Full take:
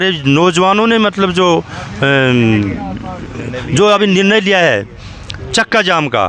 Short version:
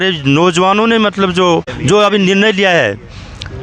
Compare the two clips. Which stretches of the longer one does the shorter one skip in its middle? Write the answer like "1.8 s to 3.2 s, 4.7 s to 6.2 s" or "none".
1.7 s to 3.6 s